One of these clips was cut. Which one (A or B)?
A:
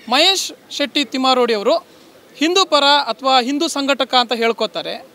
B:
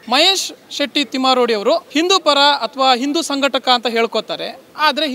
B